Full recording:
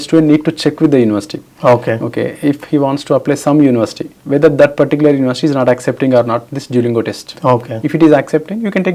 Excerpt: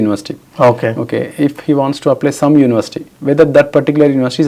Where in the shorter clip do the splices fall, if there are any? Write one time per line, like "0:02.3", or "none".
none